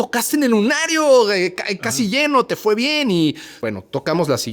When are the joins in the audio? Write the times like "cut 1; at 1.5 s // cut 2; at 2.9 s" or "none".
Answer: cut 1; at 3.5 s